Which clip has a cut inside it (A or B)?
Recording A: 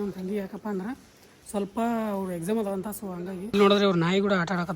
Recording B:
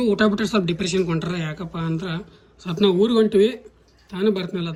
A